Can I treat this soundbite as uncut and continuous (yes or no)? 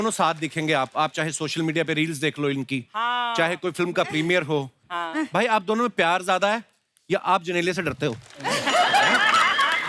no